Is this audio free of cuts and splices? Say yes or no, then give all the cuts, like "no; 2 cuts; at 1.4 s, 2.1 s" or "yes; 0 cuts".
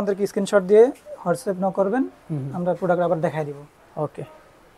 yes; 0 cuts